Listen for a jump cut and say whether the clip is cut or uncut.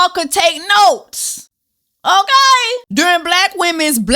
cut